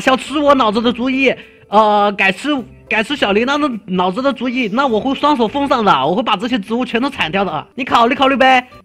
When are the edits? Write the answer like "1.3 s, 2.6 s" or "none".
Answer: 7.7 s